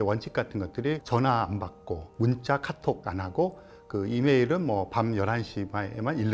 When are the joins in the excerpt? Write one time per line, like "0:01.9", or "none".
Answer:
0:01.0
0:02.1
0:03.0